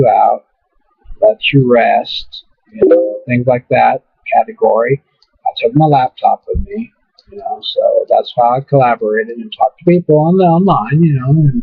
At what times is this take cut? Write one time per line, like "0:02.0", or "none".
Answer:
0:08.2